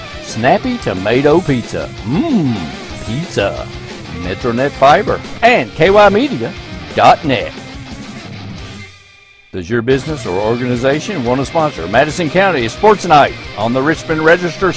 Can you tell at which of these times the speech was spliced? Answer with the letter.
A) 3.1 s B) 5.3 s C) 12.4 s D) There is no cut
B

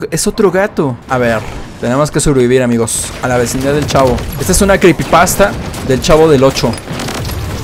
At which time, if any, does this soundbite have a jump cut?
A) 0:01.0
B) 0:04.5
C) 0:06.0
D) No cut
A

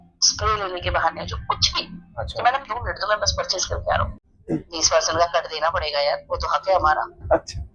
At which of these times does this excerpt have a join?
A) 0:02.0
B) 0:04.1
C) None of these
B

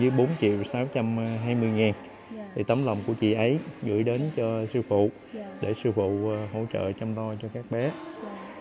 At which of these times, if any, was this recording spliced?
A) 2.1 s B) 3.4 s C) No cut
C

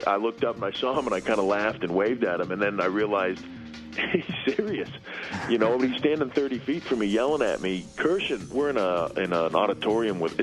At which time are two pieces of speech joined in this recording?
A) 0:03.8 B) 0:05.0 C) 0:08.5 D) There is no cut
C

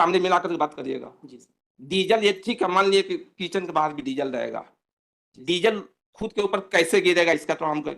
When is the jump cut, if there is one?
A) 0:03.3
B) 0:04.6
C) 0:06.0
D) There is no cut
D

